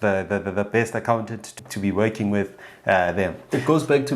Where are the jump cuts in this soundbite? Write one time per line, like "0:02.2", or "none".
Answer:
0:01.5